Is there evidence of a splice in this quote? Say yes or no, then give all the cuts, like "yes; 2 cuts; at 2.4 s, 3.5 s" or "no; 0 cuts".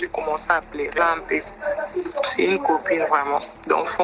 yes; 1 cut; at 1.0 s